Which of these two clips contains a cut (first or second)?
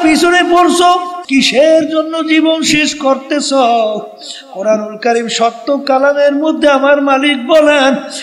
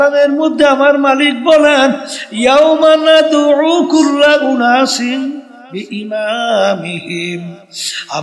first